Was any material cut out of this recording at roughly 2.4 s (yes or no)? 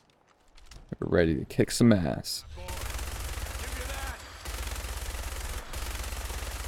yes